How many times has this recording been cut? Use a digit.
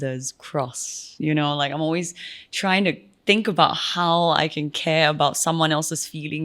1